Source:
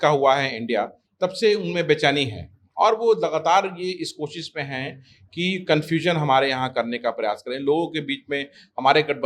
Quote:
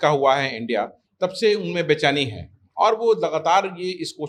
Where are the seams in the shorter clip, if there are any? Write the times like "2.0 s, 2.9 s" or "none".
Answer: none